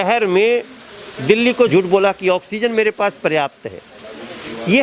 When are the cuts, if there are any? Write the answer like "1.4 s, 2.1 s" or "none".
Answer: 1.7 s